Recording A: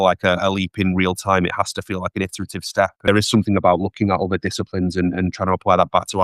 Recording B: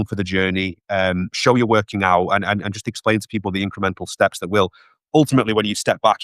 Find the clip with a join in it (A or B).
A